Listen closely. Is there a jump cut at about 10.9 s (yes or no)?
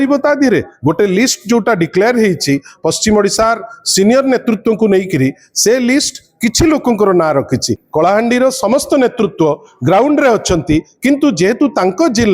no